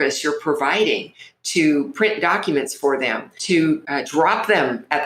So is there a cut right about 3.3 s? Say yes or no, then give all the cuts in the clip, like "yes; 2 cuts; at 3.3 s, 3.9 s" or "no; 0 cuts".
yes; 2 cuts; at 3.3 s, 3.9 s